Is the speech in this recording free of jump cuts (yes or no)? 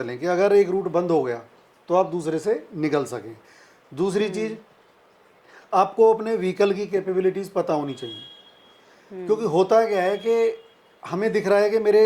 yes